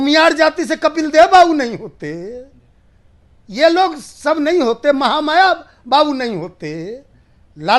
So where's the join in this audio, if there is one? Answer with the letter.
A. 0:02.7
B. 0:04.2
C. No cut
C